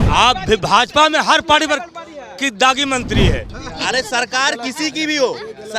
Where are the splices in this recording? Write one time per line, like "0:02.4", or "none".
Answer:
0:03.6